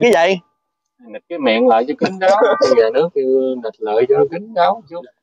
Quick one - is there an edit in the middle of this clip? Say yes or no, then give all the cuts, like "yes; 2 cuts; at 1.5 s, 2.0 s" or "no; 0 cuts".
yes; 1 cut; at 2.7 s